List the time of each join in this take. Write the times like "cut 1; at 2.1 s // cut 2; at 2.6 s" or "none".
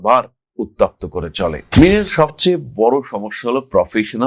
cut 1; at 1.6 s